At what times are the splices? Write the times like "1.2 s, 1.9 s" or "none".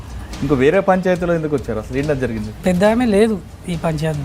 2.6 s